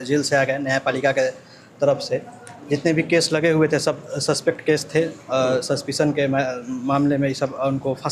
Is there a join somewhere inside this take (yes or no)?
no